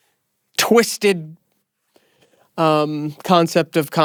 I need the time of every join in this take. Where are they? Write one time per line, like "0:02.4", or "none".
none